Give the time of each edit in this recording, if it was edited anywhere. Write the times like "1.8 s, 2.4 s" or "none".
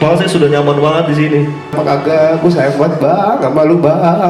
1.8 s